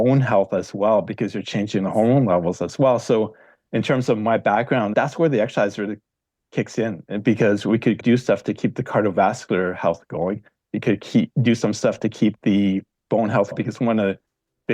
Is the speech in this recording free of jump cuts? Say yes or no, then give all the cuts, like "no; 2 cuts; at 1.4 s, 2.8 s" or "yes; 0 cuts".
no; 3 cuts; at 4.9 s, 8.0 s, 13.5 s